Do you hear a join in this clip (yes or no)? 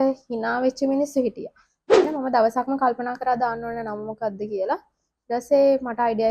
yes